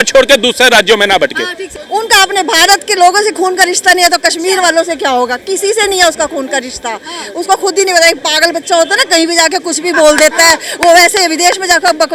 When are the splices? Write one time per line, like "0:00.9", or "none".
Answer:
0:01.6